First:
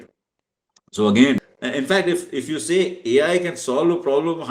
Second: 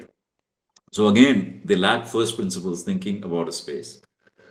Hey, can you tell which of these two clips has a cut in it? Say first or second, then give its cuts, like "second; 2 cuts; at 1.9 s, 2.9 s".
first; 1 cut; at 1.5 s